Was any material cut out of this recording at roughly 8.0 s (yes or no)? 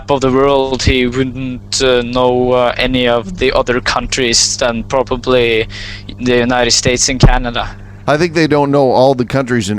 yes